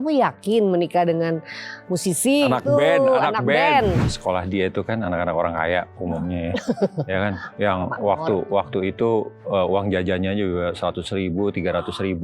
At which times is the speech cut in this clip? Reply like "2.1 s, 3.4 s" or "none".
4.0 s